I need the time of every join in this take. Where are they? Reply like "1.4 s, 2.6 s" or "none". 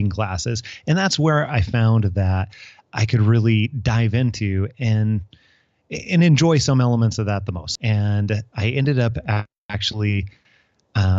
7.6 s